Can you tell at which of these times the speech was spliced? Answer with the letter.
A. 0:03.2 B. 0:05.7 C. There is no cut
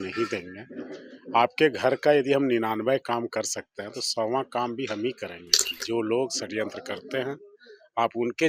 B